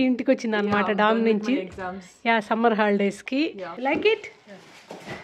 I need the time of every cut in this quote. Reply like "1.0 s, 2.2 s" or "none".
3.7 s